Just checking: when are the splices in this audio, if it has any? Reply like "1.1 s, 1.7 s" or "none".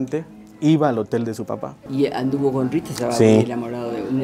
1.9 s